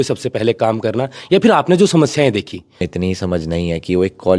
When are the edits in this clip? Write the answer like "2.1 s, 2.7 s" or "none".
2.9 s